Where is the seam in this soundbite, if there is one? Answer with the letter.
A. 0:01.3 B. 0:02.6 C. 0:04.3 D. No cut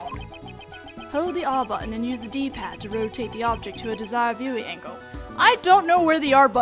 C